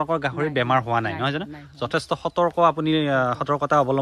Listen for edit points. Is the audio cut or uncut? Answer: uncut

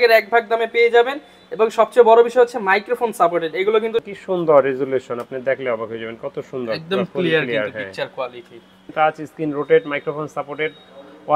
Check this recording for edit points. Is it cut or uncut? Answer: cut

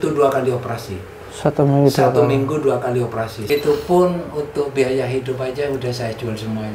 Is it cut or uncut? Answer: cut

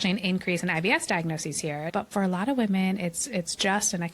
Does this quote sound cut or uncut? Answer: cut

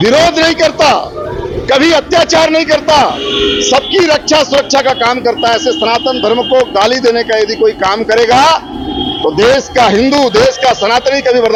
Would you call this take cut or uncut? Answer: uncut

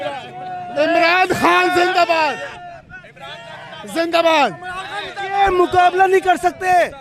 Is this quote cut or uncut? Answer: uncut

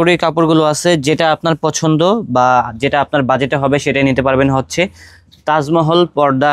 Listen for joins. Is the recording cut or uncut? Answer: uncut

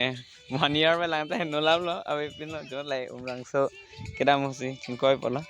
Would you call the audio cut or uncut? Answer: cut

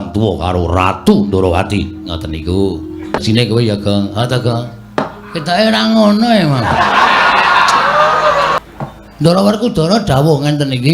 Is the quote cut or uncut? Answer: cut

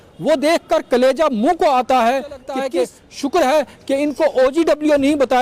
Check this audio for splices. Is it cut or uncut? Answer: cut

